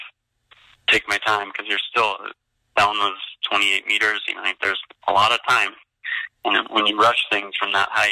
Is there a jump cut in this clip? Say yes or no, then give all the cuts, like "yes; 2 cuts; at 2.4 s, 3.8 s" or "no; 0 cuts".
no; 0 cuts